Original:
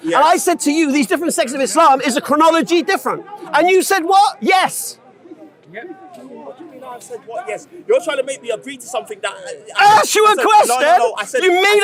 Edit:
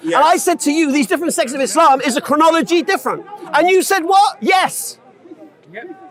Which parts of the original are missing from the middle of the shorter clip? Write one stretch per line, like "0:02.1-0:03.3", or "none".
none